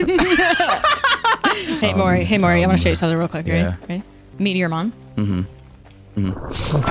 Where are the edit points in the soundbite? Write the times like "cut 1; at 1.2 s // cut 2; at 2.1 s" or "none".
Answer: cut 1; at 1.8 s // cut 2; at 4.3 s